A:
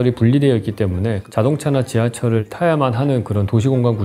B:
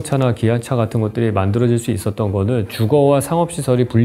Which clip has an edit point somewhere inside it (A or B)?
A